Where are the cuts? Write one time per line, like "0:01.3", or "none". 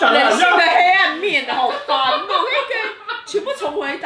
none